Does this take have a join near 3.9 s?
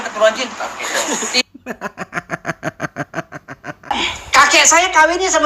yes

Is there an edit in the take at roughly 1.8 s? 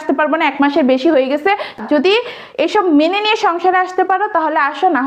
yes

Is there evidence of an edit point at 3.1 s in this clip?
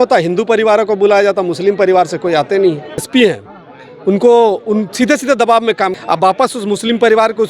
yes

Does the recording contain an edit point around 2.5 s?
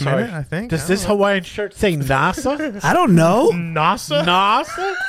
no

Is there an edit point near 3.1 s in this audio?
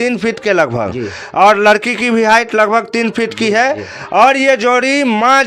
no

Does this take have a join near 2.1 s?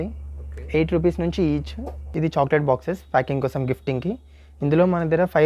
yes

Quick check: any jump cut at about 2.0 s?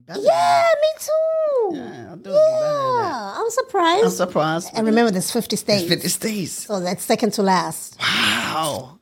no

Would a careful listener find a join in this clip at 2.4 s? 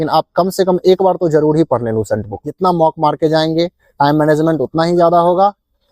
yes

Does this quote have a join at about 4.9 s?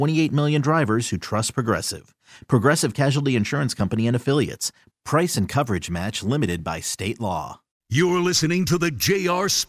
no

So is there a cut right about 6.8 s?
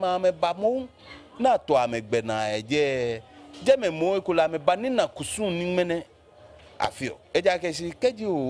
no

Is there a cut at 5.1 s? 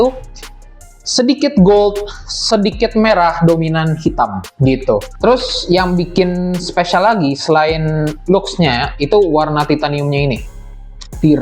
yes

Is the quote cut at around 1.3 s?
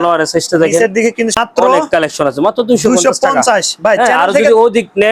yes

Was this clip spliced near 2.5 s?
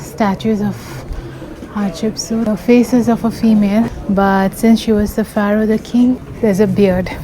yes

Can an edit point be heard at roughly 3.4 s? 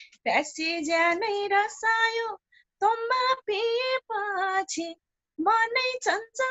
no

